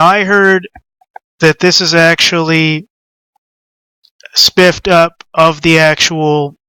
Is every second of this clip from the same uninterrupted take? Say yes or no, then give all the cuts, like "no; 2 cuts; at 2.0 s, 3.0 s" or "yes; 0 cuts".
yes; 0 cuts